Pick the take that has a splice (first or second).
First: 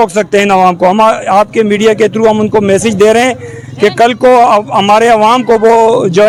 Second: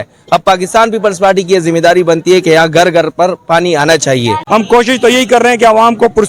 second